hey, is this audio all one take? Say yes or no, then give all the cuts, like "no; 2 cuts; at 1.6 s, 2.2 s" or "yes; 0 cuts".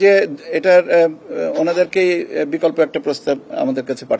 yes; 0 cuts